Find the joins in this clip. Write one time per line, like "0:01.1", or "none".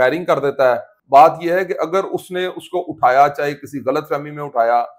0:00.9